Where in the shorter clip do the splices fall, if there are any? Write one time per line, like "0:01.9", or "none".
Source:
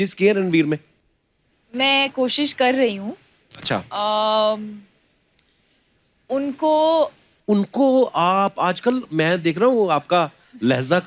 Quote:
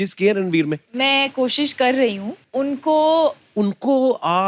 0:00.9
0:02.3
0:03.4